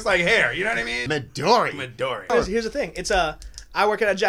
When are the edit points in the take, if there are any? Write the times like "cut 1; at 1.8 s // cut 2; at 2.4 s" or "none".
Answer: cut 1; at 1.0 s // cut 2; at 2.3 s